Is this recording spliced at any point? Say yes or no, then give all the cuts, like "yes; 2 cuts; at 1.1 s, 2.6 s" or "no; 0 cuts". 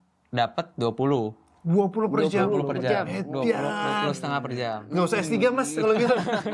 no; 0 cuts